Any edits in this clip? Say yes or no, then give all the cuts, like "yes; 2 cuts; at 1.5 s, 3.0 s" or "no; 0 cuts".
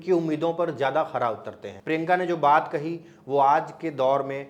no; 0 cuts